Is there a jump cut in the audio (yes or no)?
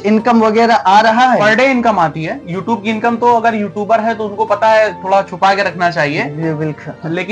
yes